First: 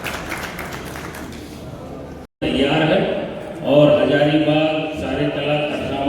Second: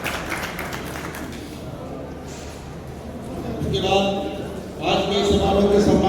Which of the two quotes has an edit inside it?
first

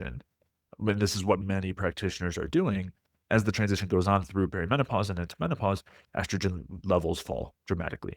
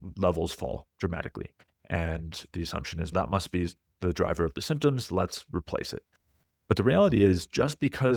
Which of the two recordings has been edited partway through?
first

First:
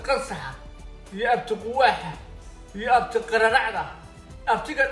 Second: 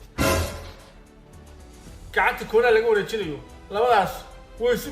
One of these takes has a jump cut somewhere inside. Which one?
second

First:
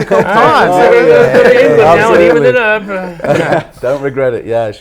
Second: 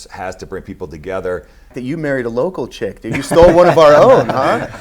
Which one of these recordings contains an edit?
second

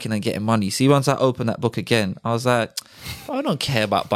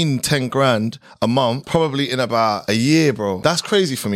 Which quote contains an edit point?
second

